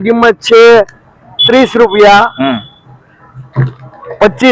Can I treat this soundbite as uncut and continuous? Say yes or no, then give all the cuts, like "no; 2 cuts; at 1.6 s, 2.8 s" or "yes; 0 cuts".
yes; 0 cuts